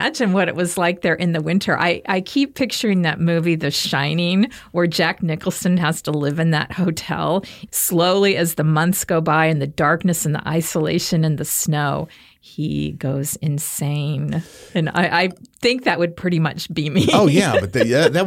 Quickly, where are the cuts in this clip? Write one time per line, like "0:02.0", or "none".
0:07.6